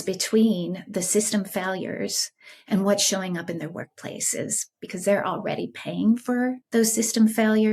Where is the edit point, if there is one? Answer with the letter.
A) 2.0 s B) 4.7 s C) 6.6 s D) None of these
C